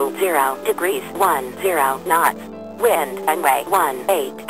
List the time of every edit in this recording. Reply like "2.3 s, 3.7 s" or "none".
2.4 s